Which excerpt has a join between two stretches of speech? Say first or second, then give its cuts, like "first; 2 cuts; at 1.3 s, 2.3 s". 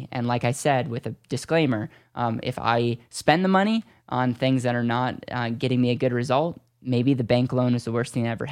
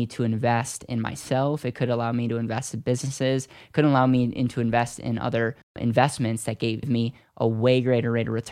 second; 2 cuts; at 5.8 s, 6.9 s